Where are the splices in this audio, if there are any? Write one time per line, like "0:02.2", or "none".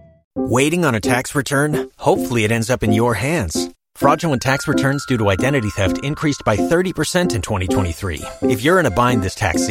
none

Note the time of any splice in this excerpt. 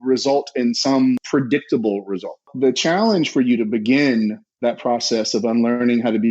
0:01.2
0:02.5

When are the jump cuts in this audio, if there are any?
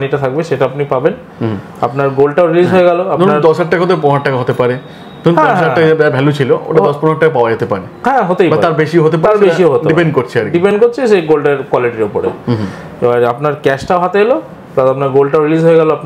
none

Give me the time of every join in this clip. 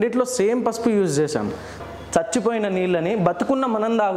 0:01.8

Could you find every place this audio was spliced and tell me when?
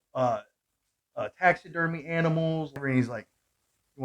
0:02.8

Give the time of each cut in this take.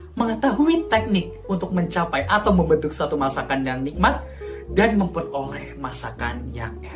none

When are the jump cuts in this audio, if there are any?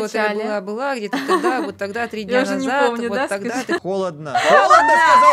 0:03.8

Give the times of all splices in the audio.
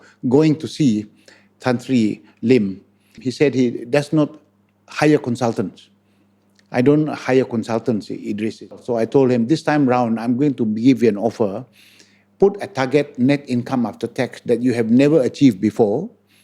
0:03.2
0:08.8

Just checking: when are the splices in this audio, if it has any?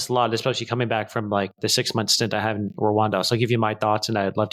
none

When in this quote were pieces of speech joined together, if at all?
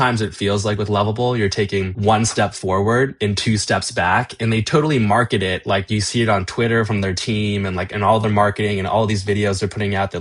0:01.9

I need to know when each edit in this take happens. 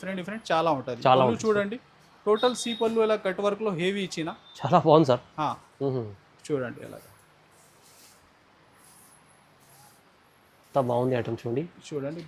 none

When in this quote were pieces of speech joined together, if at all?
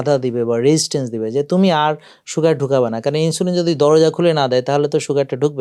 none

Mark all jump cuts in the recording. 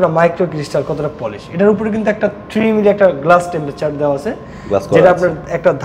none

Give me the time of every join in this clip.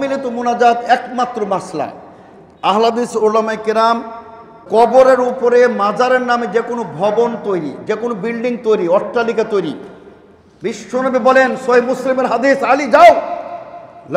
0:04.6

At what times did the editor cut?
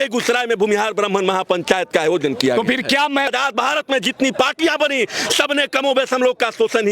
0:03.3

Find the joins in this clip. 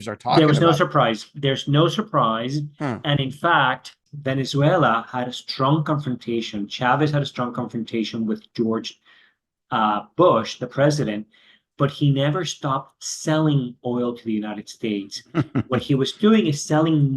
0:04.0

